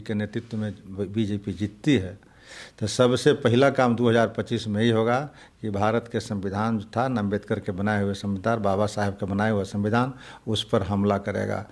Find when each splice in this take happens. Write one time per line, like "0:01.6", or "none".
none

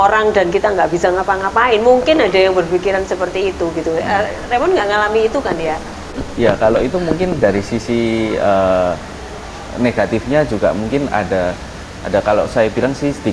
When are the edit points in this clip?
0:06.2

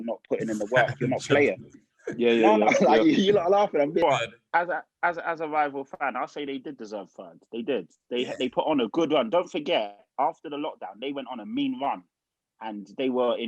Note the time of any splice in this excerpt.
0:04.0

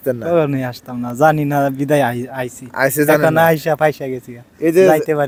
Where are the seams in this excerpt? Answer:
none

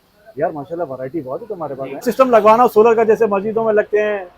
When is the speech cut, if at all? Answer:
0:02.1

